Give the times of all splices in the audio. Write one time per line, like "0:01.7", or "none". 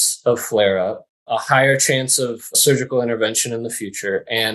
0:01.1